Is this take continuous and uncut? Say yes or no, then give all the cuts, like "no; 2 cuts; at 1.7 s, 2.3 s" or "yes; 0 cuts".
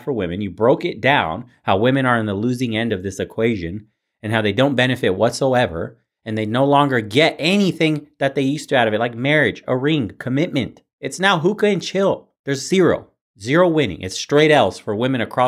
no; 1 cut; at 10.9 s